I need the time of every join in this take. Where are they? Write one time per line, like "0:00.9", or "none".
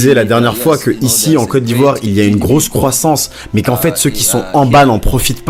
none